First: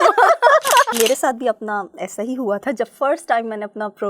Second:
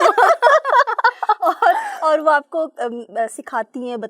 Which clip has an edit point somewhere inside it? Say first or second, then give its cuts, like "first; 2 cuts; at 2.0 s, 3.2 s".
first; 1 cut; at 0.9 s